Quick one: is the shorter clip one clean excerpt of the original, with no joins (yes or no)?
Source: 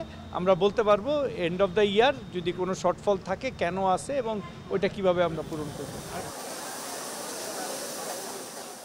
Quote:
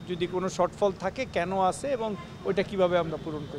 yes